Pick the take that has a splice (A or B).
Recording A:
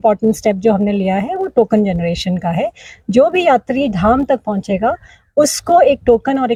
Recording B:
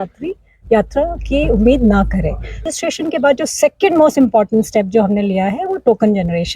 B